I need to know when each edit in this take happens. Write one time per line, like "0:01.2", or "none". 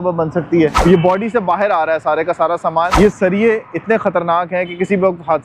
0:00.8
0:02.9